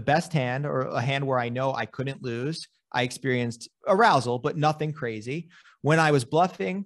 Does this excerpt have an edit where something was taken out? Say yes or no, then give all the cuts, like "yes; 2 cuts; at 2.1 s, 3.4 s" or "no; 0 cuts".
yes; 1 cut; at 3.7 s